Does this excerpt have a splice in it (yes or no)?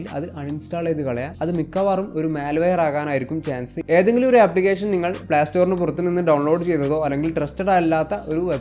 no